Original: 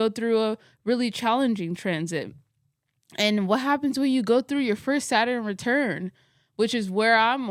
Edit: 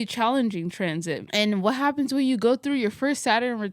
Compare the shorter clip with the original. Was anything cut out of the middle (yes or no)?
yes